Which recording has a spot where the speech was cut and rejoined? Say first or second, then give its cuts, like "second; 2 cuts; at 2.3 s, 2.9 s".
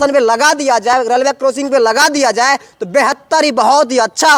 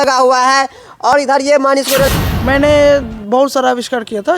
second; 1 cut; at 2.1 s